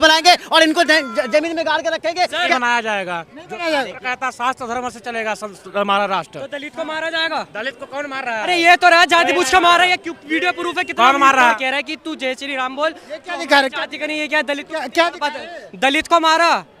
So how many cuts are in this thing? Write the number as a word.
two